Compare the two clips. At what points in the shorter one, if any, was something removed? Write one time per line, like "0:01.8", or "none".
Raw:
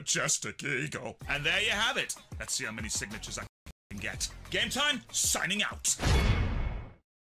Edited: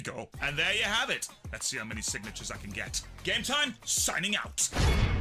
0:02.6